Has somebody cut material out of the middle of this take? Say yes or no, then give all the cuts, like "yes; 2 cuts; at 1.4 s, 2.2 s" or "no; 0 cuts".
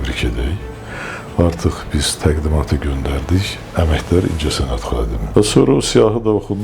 yes; 1 cut; at 5.2 s